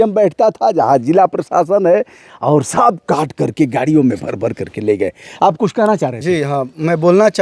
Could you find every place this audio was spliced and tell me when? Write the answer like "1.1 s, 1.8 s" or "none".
none